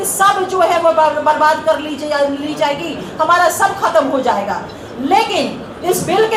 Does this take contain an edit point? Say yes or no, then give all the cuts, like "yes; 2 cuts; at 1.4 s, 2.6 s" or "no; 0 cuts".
no; 0 cuts